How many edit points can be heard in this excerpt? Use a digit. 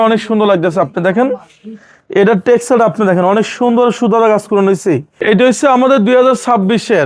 1